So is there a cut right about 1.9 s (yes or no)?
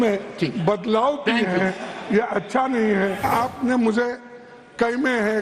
no